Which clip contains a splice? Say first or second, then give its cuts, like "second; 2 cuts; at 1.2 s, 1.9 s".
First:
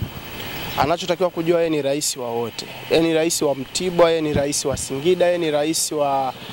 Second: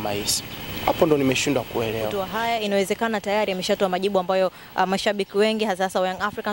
second; 1 cut; at 2.2 s